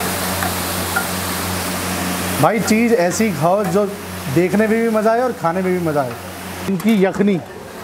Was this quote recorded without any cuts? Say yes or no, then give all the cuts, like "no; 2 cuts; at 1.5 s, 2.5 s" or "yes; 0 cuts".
no; 1 cut; at 6.7 s